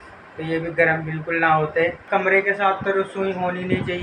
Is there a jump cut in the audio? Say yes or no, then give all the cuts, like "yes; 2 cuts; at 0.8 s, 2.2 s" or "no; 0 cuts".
no; 0 cuts